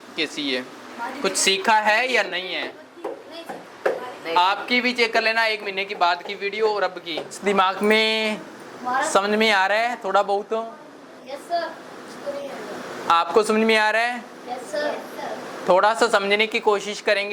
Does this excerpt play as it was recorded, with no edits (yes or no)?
no